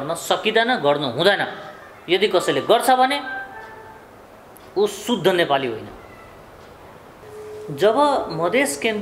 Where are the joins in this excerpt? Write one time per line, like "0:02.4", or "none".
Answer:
0:07.2

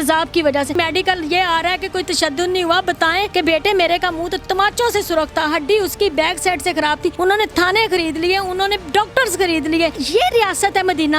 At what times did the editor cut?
0:00.7
0:03.3
0:07.1
0:10.0

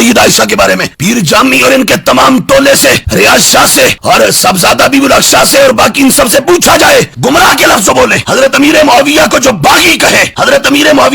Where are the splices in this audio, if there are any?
0:07.1

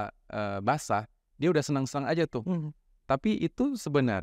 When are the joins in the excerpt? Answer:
none

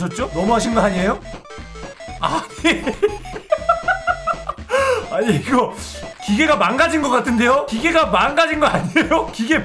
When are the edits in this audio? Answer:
0:01.3

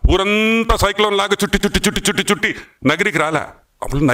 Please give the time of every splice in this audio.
none

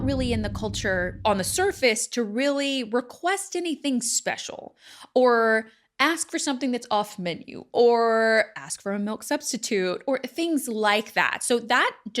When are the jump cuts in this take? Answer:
0:01.1

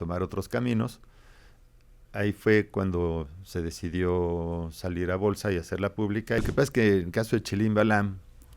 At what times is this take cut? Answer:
0:06.4

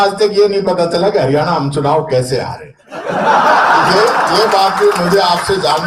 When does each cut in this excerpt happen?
none

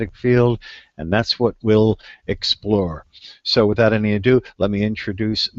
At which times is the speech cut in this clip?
0:03.1

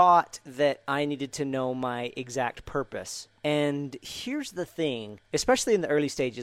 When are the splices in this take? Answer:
0:03.2
0:05.1

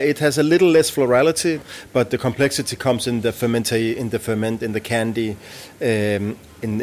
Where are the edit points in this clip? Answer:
0:01.6

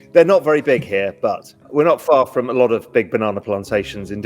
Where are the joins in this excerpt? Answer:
0:01.5

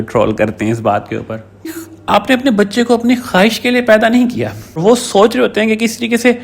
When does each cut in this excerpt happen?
0:01.9
0:04.8

